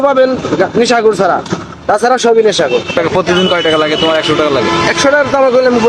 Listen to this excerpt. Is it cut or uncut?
cut